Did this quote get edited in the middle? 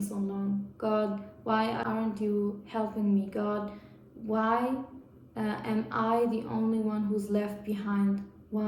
no; 0 cuts

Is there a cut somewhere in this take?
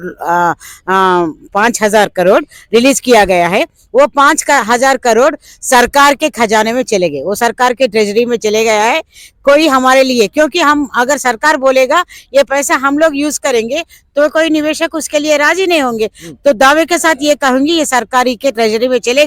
no; 0 cuts

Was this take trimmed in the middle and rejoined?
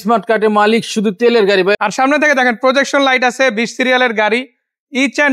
yes; 1 cut; at 1.8 s

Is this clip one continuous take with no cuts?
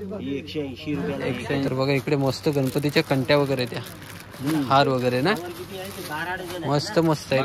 no; 1 cut; at 1.7 s

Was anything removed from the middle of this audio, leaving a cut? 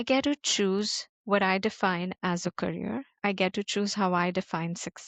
no; 0 cuts

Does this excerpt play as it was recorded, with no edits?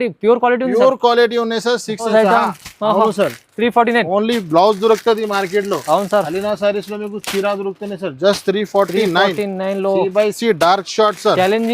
no; 1 cut; at 2.1 s

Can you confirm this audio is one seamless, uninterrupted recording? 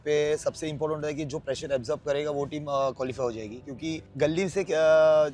no; 1 cut; at 4.1 s

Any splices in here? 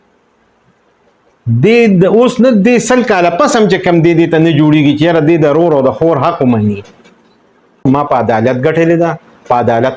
yes; 1 cut; at 7.8 s

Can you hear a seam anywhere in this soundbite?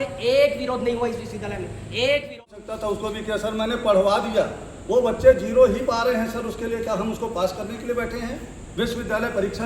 yes; 1 cut; at 2.6 s

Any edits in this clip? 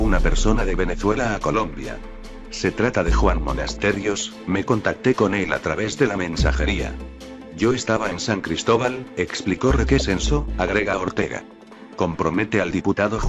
no; 0 cuts

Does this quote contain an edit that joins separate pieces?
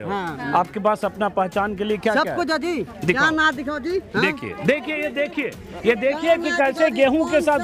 no; 0 cuts

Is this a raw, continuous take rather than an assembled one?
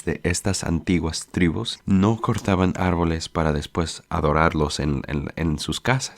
no; 2 cuts; at 1.7 s, 4.0 s

